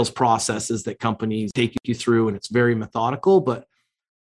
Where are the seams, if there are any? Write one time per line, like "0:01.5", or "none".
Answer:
0:01.9

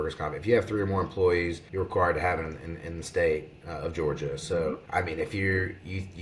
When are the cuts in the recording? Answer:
0:01.6
0:04.8

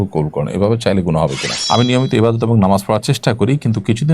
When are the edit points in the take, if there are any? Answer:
0:01.5

